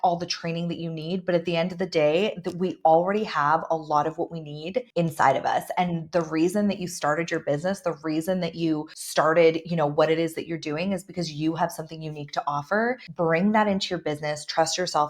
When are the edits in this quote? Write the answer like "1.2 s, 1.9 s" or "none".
4.9 s, 9.0 s, 13.1 s